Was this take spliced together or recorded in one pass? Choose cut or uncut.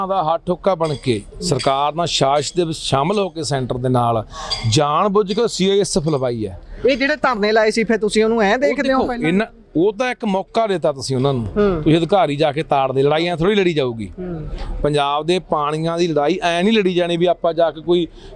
uncut